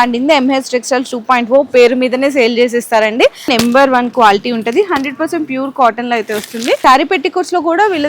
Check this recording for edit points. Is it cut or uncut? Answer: cut